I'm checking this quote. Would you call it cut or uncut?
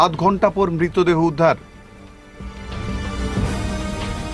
uncut